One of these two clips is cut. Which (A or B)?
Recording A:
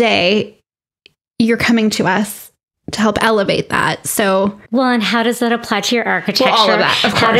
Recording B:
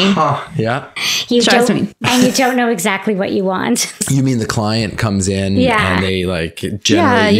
B